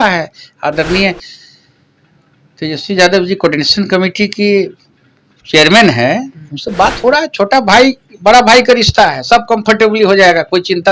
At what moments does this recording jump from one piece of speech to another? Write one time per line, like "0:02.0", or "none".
none